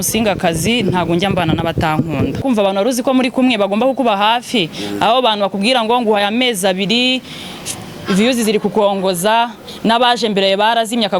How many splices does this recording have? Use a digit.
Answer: 1